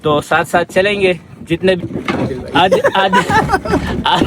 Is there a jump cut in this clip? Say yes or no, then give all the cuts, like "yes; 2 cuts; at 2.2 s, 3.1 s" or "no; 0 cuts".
yes; 1 cut; at 1.8 s